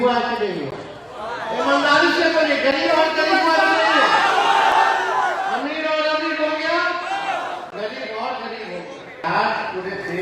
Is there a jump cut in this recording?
yes; 1 cut; at 9.2 s

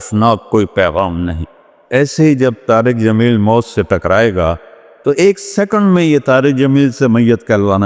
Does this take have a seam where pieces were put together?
yes; 1 cut; at 1.4 s

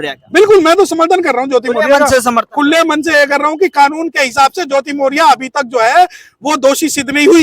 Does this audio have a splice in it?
no; 0 cuts

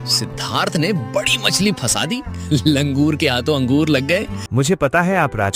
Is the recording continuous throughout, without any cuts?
no; 1 cut; at 4.4 s

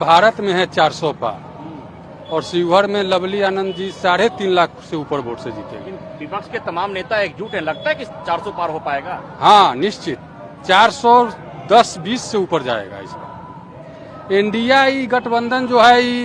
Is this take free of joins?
yes; 0 cuts

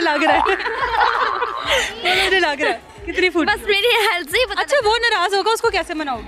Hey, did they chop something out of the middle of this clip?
no; 0 cuts

